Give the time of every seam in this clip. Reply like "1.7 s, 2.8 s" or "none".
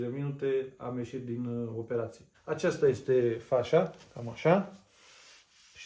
2.4 s